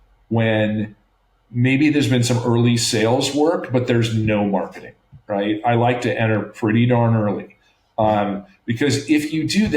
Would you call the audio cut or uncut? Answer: uncut